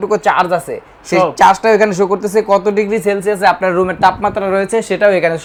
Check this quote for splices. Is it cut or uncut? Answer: uncut